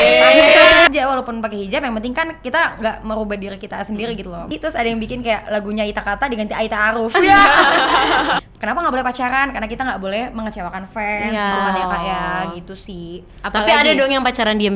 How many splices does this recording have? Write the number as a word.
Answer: three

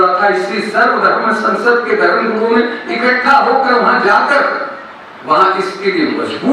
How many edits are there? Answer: zero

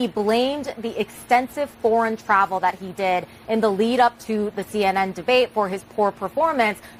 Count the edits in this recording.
zero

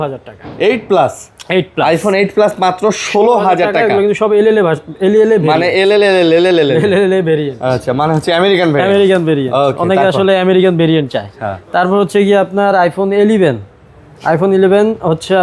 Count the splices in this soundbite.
zero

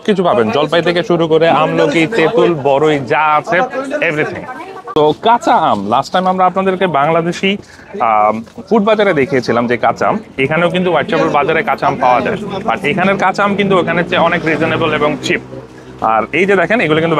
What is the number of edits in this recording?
zero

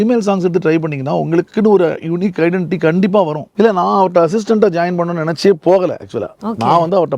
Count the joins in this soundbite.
one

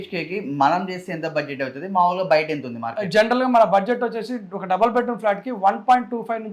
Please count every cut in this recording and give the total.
zero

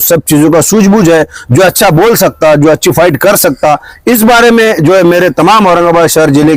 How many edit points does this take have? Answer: zero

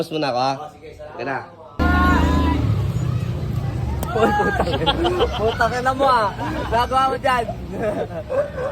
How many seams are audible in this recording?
one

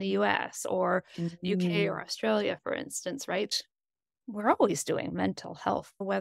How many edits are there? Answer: one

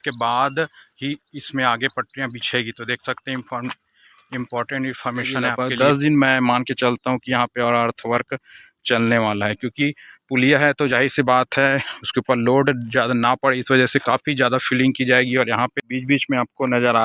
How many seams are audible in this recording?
two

